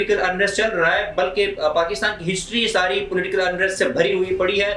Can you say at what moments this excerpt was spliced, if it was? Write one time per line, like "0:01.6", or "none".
none